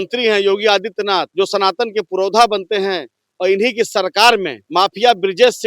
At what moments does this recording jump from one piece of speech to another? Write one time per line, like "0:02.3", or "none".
0:01.3
0:04.6